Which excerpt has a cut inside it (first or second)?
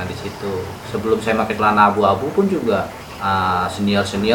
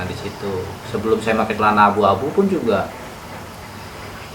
first